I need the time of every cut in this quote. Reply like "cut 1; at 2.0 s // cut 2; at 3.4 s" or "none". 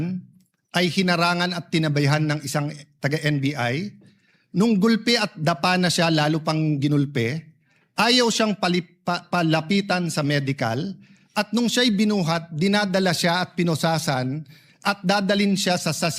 none